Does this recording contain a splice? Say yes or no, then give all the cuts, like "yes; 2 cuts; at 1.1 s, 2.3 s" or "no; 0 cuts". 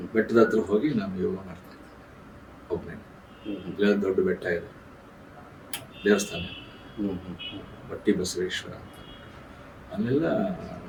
no; 0 cuts